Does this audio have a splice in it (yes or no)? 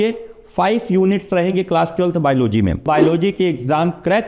yes